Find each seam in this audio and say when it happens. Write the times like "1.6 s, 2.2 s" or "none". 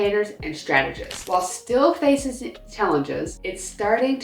1.1 s